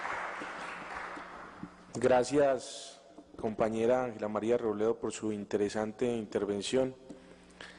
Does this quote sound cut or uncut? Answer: uncut